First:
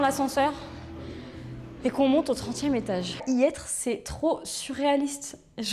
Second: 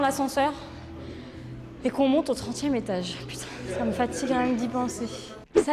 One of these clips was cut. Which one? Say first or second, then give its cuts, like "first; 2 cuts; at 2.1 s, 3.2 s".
first; 1 cut; at 3.2 s